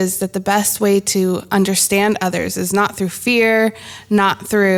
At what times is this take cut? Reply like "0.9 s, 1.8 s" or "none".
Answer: none